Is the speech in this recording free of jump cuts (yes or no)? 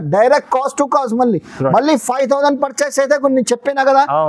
yes